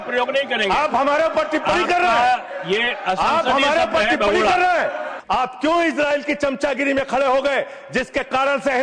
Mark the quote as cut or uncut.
cut